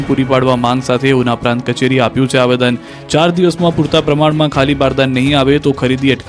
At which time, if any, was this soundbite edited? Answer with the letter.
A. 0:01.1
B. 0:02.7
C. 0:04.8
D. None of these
B